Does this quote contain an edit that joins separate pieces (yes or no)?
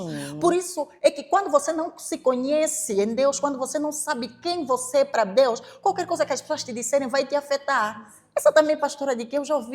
no